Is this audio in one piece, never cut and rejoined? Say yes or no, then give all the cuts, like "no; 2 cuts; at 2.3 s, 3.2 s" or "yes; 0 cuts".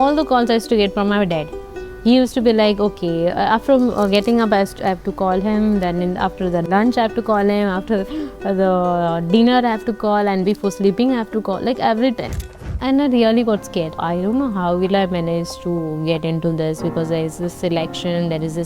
no; 3 cuts; at 6.7 s, 12.4 s, 14.0 s